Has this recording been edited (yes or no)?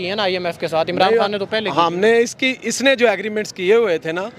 no